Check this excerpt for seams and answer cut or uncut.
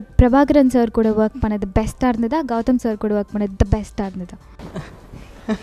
uncut